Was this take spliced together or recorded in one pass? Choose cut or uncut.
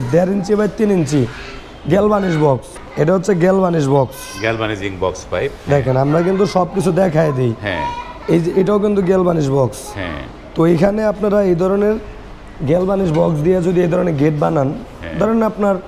cut